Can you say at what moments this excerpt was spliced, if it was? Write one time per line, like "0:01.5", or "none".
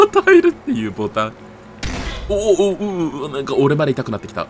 none